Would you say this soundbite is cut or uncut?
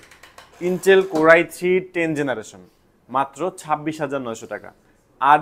uncut